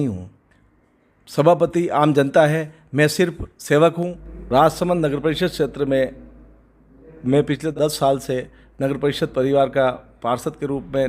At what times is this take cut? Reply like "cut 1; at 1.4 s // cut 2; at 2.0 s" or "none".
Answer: cut 1; at 4.0 s // cut 2; at 7.6 s

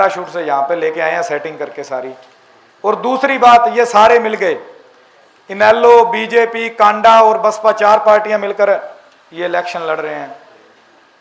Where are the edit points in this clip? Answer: none

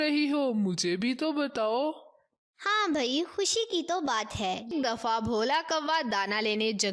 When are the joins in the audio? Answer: cut 1; at 4.7 s

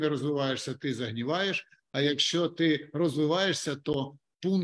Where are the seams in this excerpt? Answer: none

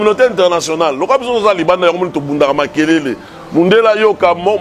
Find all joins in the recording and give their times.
none

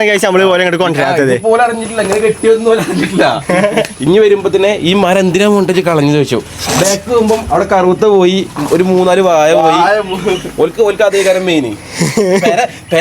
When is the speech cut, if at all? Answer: cut 1; at 4.0 s

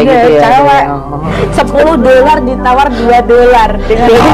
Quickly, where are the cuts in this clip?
cut 1; at 1.2 s

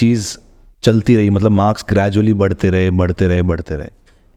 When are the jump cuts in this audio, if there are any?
none

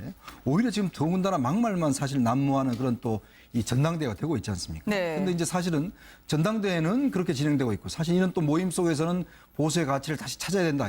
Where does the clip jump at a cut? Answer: cut 1; at 3.7 s

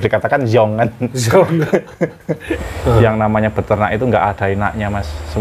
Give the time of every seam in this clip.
cut 1; at 2.5 s

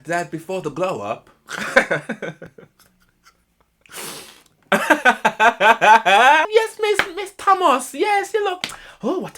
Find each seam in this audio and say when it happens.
cut 1; at 6.5 s

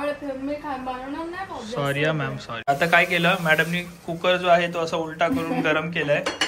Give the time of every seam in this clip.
cut 1; at 2.7 s

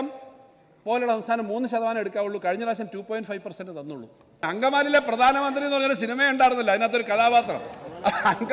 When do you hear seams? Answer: cut 1; at 4.4 s

